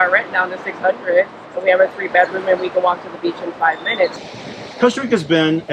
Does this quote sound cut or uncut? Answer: cut